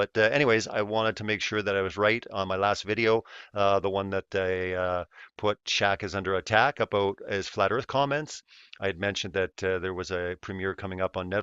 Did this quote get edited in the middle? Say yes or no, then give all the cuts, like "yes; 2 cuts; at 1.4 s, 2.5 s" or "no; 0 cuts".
yes; 1 cut; at 1.2 s